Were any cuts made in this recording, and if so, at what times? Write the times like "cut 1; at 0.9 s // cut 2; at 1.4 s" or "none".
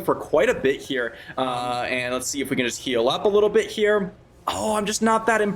cut 1; at 1.2 s